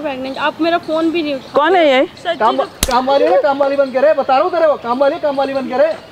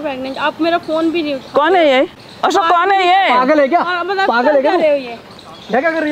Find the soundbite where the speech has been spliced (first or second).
first